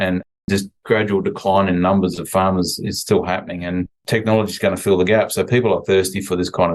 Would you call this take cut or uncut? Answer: uncut